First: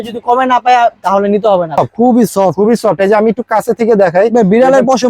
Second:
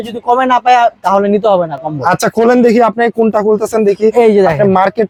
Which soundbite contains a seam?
first; 1 cut; at 1.8 s

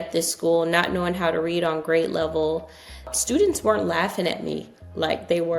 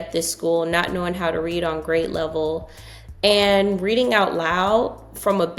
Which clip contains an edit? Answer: first; 1 cut; at 3.1 s

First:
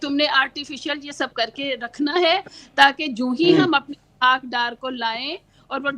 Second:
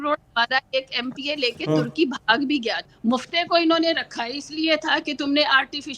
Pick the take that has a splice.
second; 1 cut; at 2.8 s

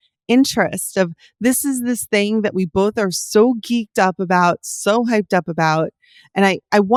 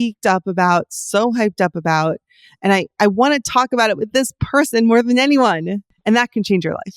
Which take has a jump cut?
second; 1 cut; at 5.9 s

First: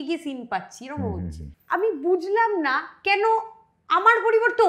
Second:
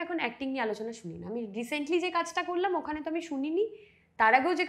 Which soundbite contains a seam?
first; 1 cut; at 1.5 s

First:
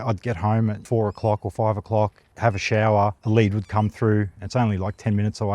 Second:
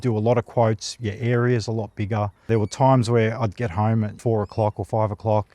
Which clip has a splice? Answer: first; 1 cut; at 3.2 s

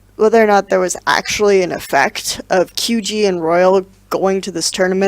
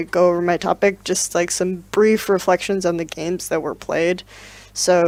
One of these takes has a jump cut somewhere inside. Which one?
first; 1 cut; at 3.9 s

